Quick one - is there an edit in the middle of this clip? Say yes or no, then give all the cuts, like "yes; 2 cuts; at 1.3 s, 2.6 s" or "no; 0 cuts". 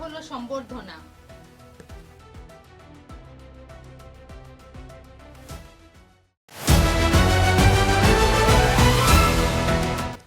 yes; 1 cut; at 6.3 s